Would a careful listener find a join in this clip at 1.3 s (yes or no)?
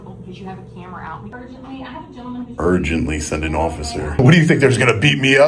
yes